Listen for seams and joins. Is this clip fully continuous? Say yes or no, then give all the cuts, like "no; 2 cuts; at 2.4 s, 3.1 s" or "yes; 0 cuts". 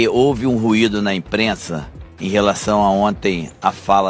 yes; 0 cuts